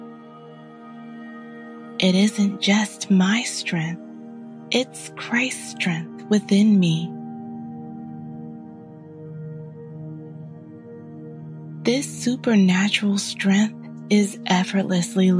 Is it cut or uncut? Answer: cut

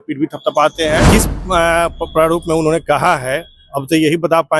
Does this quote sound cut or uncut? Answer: cut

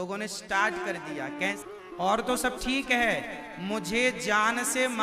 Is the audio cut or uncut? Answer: cut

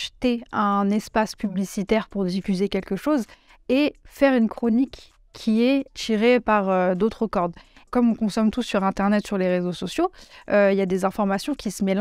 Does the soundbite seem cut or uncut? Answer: cut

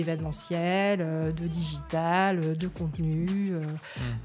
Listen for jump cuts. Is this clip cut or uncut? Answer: uncut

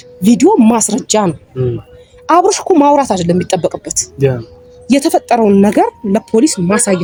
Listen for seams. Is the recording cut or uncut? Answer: uncut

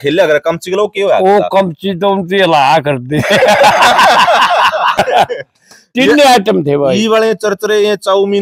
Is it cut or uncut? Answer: cut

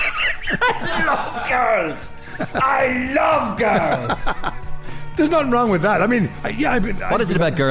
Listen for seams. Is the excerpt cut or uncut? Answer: cut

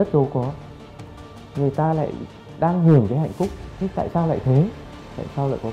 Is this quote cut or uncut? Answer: uncut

